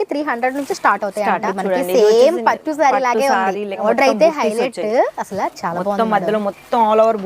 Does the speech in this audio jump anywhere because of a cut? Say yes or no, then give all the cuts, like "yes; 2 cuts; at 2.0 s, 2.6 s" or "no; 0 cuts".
yes; 2 cuts; at 1.4 s, 3.8 s